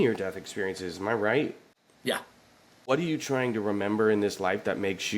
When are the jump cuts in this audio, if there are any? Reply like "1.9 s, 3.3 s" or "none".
2.9 s